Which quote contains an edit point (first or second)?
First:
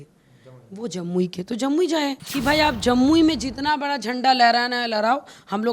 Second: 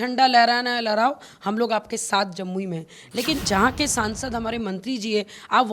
first